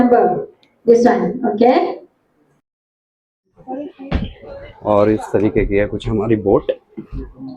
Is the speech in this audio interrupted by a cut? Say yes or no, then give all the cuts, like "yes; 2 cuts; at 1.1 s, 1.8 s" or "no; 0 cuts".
yes; 1 cut; at 2.8 s